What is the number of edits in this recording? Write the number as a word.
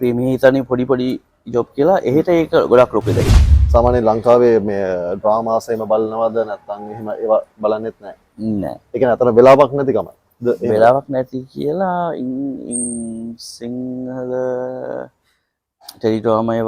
one